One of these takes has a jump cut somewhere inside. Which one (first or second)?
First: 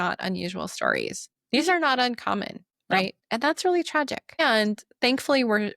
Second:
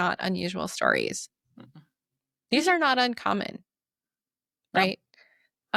first